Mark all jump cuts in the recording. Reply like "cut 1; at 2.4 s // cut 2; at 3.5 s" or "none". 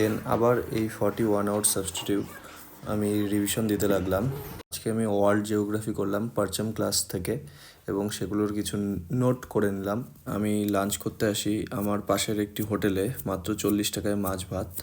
cut 1; at 4.8 s // cut 2; at 10.3 s